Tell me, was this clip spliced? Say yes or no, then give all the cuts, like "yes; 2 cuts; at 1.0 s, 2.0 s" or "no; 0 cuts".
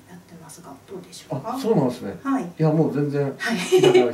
no; 0 cuts